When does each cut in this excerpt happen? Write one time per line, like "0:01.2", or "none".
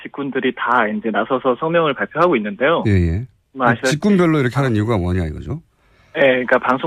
0:01.4